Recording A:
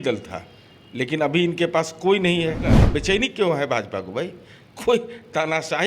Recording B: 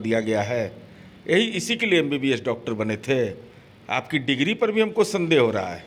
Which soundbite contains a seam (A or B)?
A